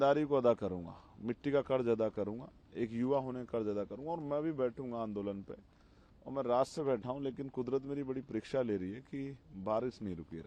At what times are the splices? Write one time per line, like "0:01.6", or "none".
none